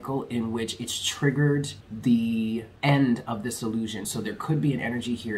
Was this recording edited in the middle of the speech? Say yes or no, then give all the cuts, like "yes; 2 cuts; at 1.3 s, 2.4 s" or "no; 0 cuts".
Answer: yes; 3 cuts; at 1.8 s, 2.7 s, 4.0 s